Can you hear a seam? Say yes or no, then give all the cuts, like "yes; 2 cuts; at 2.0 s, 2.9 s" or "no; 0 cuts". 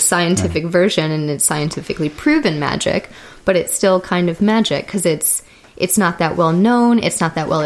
no; 0 cuts